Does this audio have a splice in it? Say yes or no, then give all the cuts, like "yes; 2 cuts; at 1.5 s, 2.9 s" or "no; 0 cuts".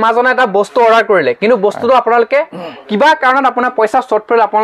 no; 0 cuts